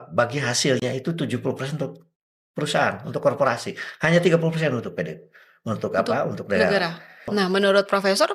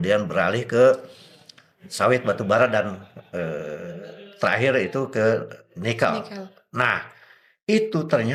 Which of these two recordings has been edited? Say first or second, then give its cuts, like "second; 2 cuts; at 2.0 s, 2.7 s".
first; 1 cut; at 7.3 s